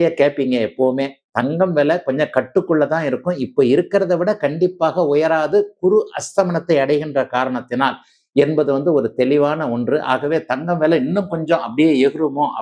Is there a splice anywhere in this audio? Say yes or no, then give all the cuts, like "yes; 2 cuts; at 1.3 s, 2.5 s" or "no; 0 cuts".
no; 0 cuts